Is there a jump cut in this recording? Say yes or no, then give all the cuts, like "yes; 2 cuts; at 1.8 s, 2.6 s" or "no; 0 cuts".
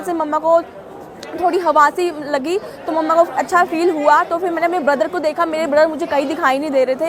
no; 0 cuts